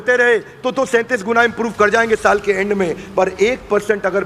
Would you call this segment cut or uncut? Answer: uncut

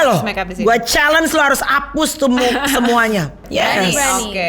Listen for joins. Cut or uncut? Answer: cut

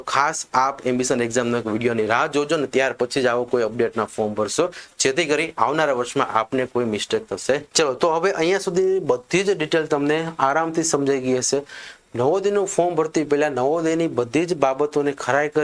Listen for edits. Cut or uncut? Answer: uncut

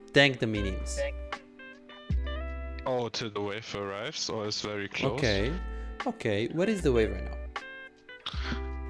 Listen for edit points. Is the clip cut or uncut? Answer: uncut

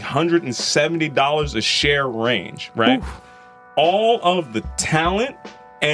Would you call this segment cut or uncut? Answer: uncut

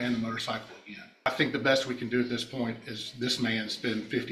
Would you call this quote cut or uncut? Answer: cut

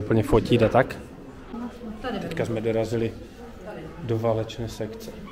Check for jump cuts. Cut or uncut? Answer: uncut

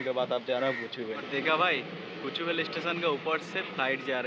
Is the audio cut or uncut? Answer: cut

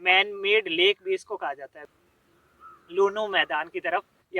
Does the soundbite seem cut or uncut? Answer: cut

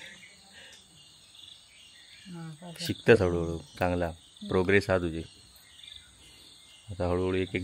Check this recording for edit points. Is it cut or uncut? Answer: uncut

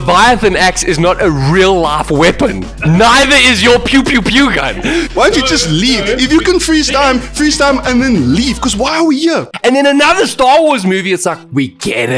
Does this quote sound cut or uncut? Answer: cut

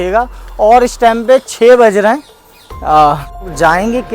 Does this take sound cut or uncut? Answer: cut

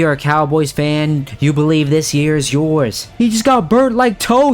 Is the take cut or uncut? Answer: cut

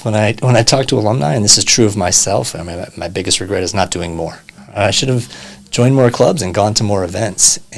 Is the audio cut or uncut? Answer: cut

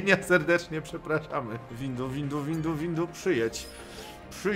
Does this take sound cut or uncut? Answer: cut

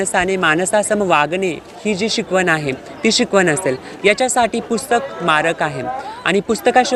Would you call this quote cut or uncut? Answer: uncut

